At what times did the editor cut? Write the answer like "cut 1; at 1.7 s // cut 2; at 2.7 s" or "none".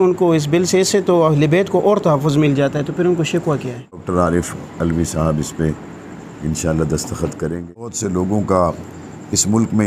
cut 1; at 3.9 s // cut 2; at 8.0 s